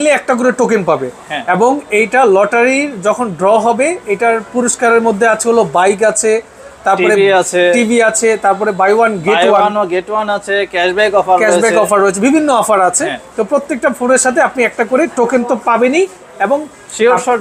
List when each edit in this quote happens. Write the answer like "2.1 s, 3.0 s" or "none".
none